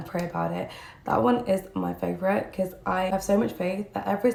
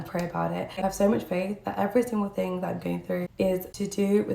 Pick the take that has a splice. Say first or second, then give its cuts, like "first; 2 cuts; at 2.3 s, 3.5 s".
second; 2 cuts; at 0.8 s, 3.3 s